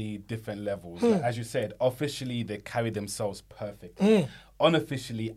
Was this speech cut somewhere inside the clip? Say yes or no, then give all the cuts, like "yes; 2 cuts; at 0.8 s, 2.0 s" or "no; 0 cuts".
no; 0 cuts